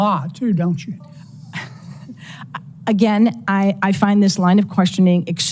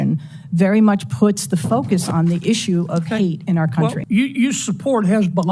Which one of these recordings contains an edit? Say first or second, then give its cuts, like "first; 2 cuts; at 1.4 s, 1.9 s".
second; 1 cut; at 4.0 s